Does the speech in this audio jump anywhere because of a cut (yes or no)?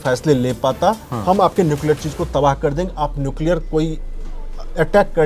no